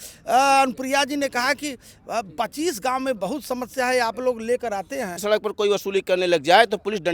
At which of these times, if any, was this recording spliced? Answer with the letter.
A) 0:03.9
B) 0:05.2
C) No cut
B